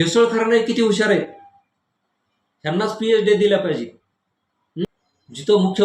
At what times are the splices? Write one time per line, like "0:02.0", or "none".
0:04.9